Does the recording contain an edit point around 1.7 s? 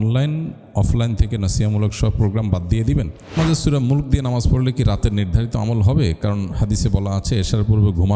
no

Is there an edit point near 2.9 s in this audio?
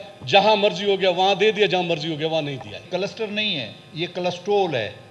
yes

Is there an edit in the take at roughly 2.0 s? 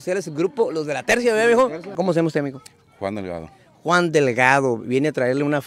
yes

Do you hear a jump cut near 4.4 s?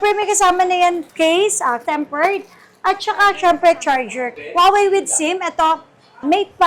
yes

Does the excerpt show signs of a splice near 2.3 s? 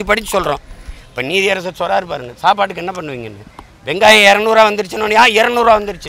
yes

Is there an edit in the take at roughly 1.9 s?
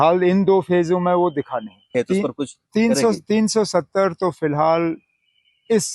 yes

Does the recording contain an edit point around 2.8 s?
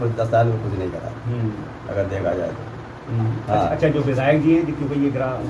no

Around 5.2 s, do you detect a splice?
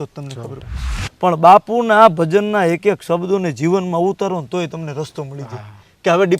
no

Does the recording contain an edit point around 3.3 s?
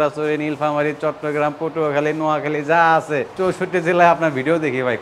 yes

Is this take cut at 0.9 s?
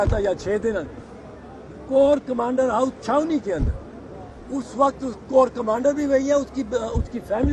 no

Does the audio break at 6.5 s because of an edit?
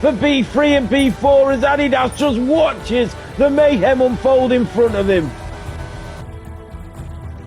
no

